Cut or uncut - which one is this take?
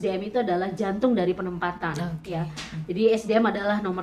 uncut